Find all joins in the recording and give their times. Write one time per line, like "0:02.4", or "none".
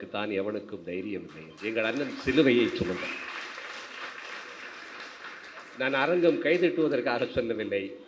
none